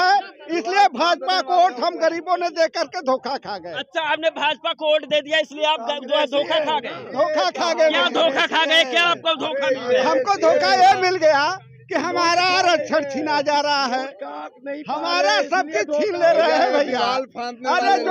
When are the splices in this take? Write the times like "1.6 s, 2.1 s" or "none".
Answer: none